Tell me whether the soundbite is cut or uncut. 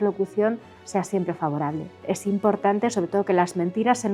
cut